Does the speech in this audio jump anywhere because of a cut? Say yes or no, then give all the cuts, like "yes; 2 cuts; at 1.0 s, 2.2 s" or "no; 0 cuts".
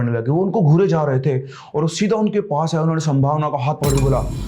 no; 0 cuts